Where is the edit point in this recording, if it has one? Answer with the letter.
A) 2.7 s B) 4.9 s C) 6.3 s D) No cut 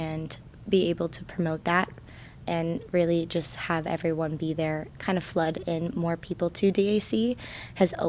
B